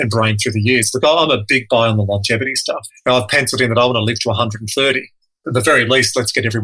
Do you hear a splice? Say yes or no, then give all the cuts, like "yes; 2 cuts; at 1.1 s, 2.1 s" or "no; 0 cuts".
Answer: yes; 2 cuts; at 2.9 s, 5.4 s